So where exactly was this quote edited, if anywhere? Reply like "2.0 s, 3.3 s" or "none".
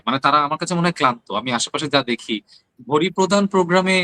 2.7 s